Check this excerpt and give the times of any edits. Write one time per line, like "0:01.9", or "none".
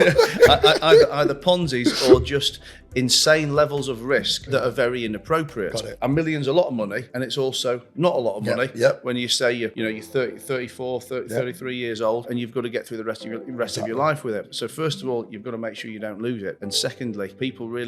0:04.5
0:05.9
0:07.1
0:09.7
0:12.3
0:14.5
0:17.0